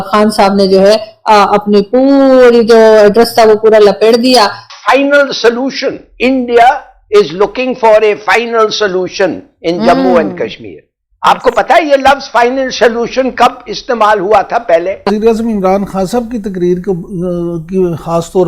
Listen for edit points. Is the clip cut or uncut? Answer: cut